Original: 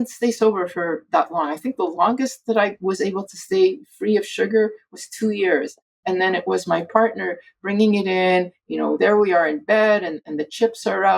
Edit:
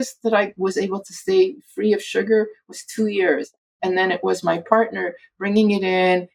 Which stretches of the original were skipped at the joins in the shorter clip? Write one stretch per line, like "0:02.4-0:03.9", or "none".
none